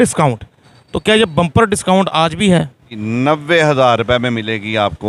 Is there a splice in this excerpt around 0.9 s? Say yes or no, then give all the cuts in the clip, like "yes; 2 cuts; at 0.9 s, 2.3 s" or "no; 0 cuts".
no; 1 cut; at 2.9 s